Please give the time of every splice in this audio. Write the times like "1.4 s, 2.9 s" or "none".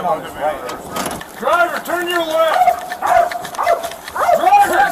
1.1 s